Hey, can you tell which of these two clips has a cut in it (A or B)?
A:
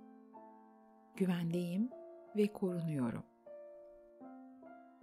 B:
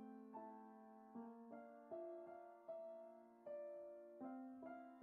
A